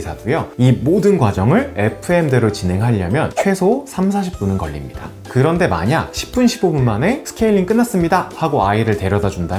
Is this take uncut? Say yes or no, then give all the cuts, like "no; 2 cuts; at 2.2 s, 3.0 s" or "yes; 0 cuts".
yes; 0 cuts